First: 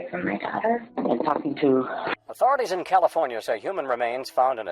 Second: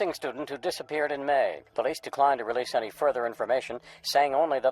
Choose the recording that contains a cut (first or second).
first